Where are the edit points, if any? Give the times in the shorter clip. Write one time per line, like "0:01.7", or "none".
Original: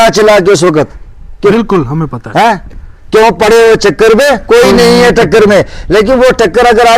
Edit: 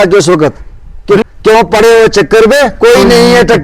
0:01.2